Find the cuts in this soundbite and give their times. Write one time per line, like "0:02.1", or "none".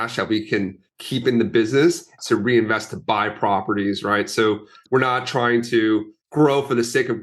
0:02.1
0:04.8